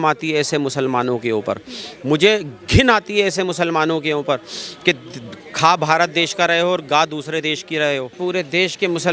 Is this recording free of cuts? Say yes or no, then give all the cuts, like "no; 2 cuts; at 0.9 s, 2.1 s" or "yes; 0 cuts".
no; 1 cut; at 8.2 s